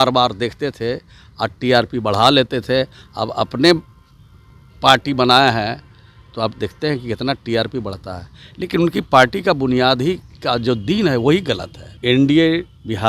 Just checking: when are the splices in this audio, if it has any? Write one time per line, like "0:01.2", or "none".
0:11.9